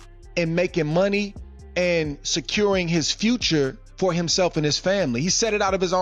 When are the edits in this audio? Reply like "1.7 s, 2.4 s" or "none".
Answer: none